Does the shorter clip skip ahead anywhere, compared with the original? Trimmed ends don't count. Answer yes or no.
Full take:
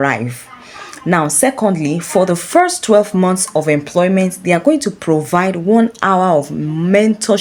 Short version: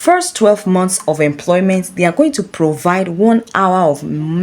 no